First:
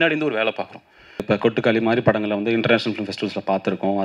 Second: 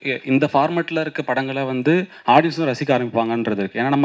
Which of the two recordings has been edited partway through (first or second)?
first